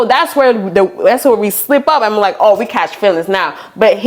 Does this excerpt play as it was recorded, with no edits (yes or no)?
yes